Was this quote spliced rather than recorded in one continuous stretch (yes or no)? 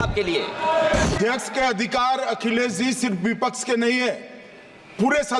yes